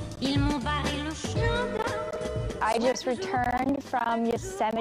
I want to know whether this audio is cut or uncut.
cut